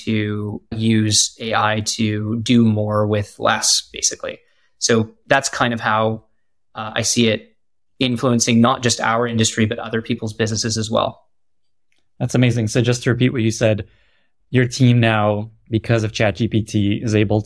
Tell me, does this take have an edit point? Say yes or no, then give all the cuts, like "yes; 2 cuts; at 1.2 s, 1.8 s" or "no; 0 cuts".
no; 0 cuts